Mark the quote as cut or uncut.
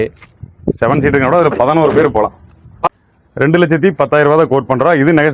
cut